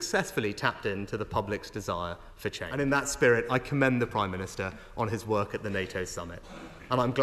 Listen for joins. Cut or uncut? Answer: cut